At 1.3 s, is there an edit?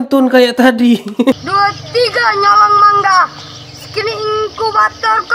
yes; 1 cut; at 1.3 s

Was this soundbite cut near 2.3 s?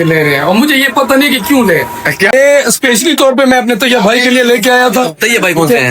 yes; 1 cut; at 2.3 s

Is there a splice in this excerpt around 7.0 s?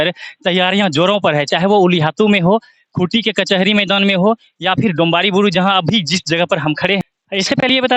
yes; 1 cut; at 7.0 s

